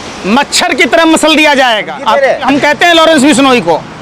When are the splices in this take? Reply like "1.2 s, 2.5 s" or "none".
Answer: 2.4 s